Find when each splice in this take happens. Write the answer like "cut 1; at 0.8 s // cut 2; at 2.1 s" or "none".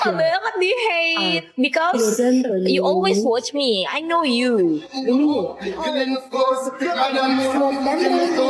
none

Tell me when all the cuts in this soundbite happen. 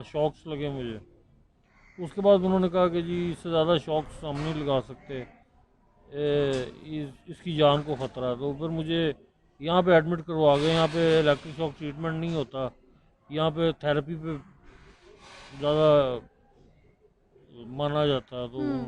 none

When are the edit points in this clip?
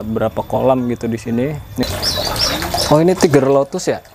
cut 1; at 1.8 s

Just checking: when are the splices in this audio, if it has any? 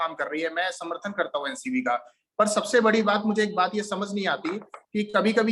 none

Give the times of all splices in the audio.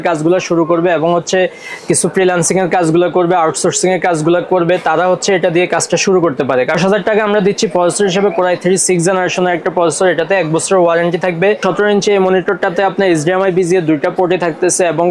cut 1; at 6.8 s // cut 2; at 11.6 s

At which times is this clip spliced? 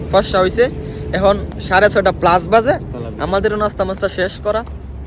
none

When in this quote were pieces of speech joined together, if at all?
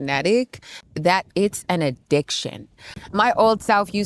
cut 1; at 2.9 s

